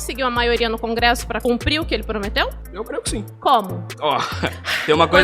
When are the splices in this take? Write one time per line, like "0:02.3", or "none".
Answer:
0:01.4
0:02.9
0:03.8